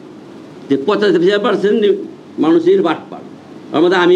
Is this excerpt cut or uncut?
uncut